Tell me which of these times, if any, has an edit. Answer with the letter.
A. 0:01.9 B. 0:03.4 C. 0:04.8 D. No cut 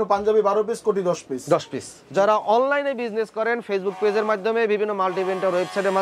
A